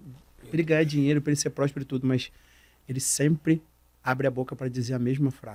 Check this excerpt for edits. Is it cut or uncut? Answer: uncut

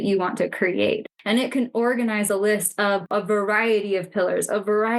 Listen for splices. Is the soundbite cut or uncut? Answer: cut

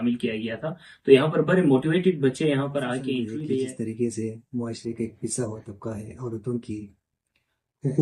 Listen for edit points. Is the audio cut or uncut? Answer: cut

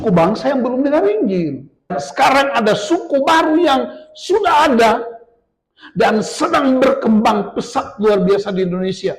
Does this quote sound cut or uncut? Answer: cut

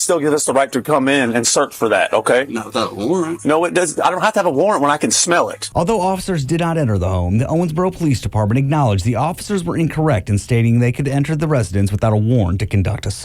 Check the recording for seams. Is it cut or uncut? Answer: cut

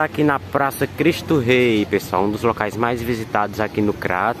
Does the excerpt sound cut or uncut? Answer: uncut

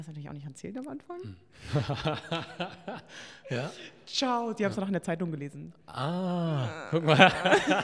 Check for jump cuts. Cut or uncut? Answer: uncut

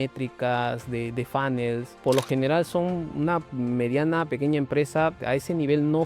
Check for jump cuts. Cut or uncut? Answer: cut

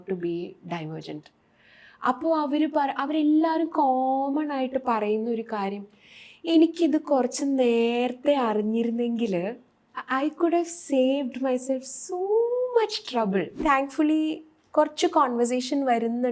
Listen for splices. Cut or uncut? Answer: cut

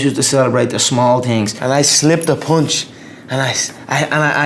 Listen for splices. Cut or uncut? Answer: cut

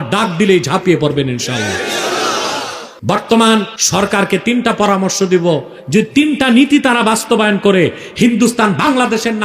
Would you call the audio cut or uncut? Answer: cut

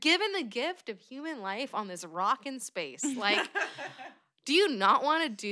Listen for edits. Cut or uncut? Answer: uncut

